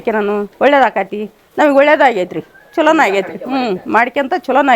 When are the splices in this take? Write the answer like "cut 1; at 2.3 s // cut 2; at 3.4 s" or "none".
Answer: none